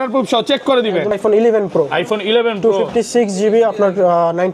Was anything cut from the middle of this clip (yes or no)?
yes